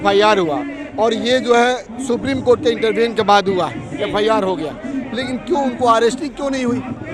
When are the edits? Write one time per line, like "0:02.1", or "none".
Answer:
none